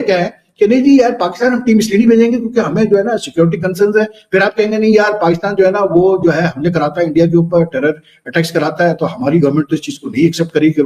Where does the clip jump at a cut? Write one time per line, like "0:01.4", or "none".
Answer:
none